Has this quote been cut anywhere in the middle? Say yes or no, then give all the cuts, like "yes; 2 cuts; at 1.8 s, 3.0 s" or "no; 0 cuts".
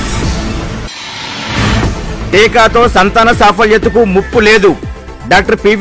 yes; 1 cut; at 1.7 s